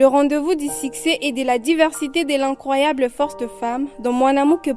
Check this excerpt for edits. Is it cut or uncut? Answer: uncut